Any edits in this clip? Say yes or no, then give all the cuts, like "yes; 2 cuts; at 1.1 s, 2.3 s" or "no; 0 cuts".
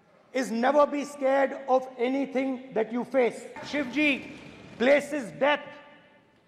yes; 1 cut; at 3.7 s